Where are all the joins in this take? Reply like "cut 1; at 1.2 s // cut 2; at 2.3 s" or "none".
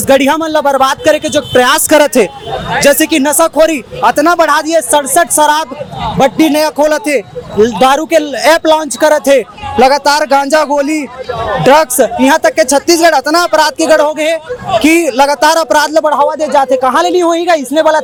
none